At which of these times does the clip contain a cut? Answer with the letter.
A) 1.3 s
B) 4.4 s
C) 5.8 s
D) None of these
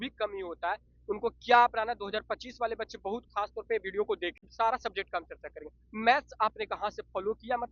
B